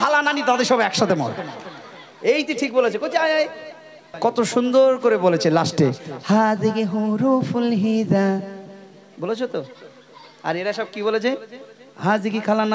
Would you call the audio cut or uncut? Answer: cut